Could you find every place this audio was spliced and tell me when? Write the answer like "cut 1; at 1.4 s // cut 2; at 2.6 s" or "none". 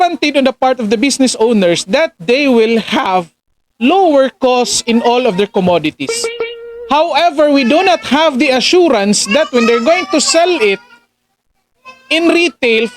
none